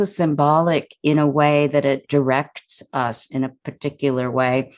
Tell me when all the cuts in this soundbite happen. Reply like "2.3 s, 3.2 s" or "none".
2.0 s